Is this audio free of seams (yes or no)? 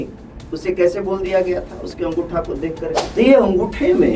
no